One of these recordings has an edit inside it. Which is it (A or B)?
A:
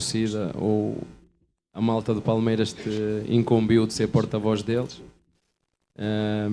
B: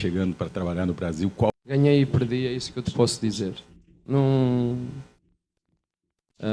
B